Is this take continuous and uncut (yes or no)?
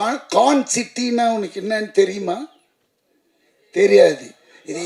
yes